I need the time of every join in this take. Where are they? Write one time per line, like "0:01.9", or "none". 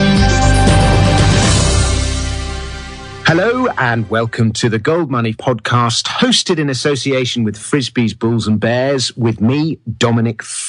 0:08.4